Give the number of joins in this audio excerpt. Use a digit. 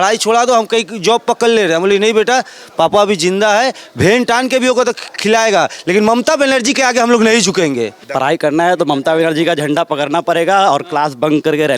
1